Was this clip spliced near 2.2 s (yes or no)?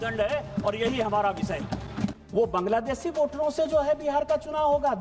yes